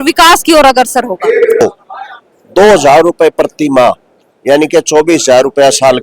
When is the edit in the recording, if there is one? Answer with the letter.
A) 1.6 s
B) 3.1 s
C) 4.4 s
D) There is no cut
A